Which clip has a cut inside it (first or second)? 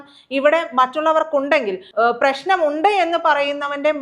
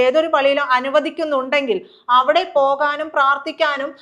first